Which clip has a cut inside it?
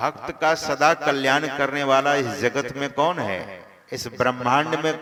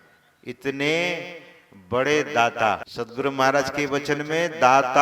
second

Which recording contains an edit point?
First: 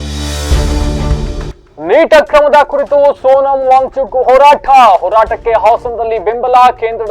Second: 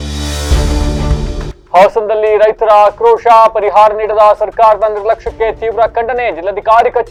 first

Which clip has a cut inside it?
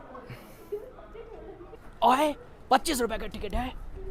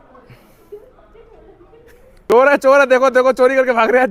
first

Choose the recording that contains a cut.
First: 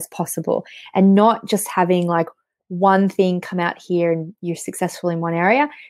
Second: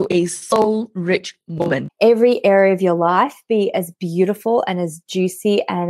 second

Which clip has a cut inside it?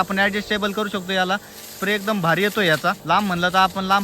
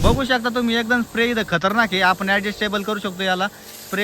first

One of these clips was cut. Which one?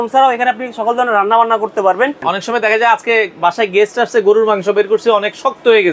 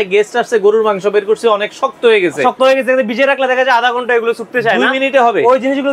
first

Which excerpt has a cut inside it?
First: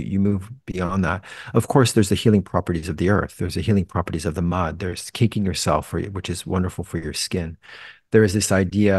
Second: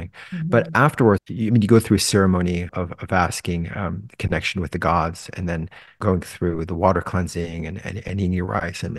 second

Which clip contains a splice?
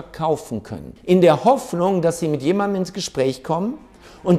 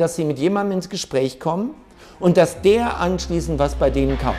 first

